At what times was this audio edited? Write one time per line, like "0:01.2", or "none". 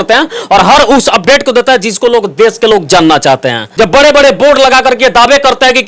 0:03.6